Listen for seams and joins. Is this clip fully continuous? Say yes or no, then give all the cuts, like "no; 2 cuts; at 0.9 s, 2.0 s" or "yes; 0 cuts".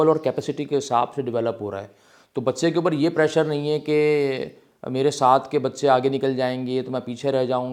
yes; 0 cuts